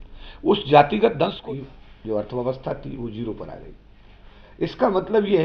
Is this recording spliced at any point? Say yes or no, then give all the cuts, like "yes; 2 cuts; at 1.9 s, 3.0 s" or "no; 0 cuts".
yes; 1 cut; at 1.4 s